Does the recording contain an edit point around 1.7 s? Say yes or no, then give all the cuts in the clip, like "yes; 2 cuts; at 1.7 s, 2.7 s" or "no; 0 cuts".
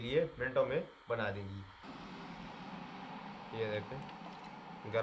yes; 1 cut; at 1.7 s